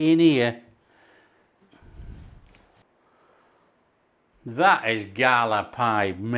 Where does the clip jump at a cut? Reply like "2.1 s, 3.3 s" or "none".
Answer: 1.6 s, 2.8 s